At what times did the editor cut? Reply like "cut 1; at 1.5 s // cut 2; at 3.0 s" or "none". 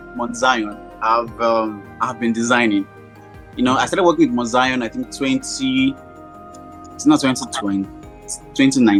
none